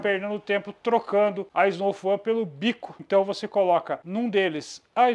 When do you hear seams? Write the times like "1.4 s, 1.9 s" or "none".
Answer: 1.4 s, 2.9 s, 4.0 s